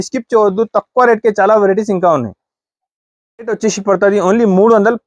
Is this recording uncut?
no; 1 cut; at 3.3 s

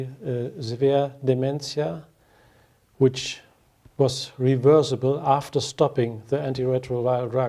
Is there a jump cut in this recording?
yes; 1 cut; at 2.0 s

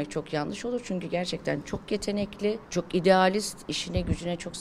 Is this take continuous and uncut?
no; 1 cut; at 2.7 s

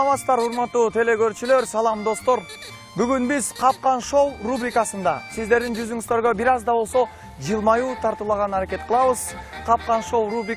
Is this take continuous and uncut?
yes; 0 cuts

